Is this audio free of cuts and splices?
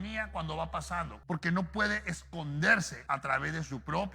no; 2 cuts; at 1.1 s, 3.0 s

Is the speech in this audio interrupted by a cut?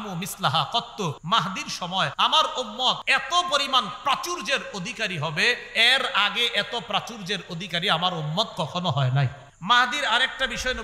yes; 4 cuts; at 1.2 s, 2.1 s, 3.0 s, 9.5 s

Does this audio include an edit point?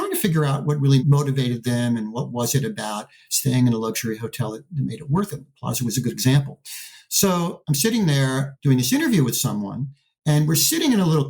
no; 0 cuts

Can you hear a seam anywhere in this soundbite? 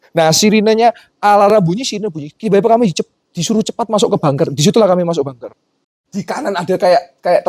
yes; 1 cut; at 5.9 s

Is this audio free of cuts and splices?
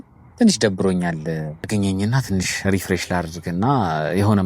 no; 1 cut; at 1.7 s

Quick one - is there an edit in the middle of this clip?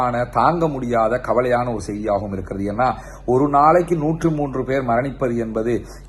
no; 0 cuts

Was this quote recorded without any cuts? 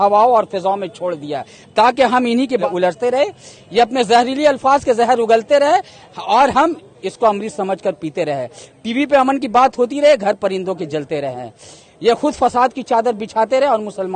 no; 1 cut; at 2.6 s

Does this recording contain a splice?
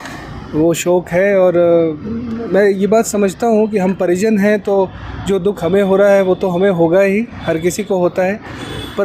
no; 0 cuts

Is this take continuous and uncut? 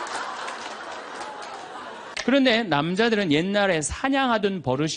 no; 1 cut; at 2.0 s

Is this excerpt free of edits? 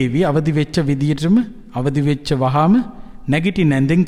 yes; 0 cuts

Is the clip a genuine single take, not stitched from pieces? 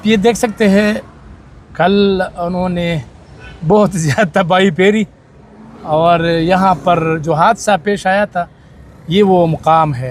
yes; 0 cuts

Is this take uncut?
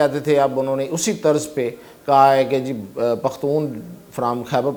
yes; 0 cuts

